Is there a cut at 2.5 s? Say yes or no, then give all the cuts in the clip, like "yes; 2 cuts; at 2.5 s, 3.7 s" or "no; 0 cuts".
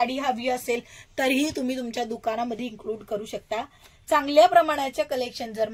no; 0 cuts